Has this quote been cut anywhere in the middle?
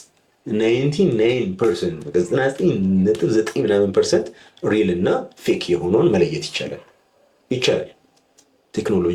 no; 0 cuts

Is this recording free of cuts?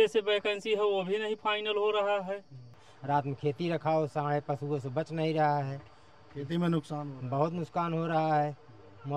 no; 1 cut; at 2.9 s

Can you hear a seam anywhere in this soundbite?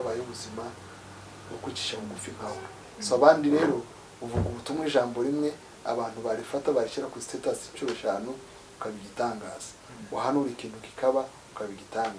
no; 0 cuts

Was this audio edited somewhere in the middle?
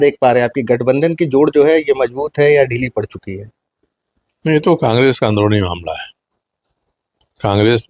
no; 0 cuts

